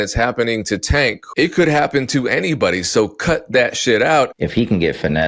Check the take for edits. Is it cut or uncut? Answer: cut